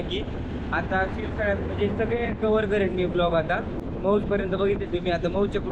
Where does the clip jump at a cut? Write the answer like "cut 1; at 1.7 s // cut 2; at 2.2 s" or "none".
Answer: cut 1; at 3.9 s